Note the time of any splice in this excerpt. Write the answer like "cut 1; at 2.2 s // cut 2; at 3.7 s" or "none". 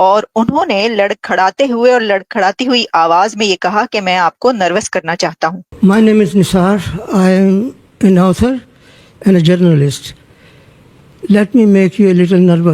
cut 1; at 5.6 s